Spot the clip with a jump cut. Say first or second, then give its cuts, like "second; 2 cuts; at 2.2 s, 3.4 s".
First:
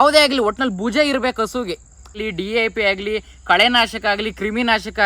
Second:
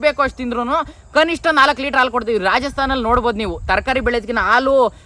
first; 1 cut; at 2.1 s